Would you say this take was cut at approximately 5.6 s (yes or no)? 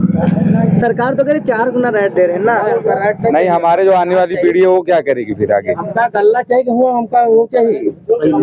no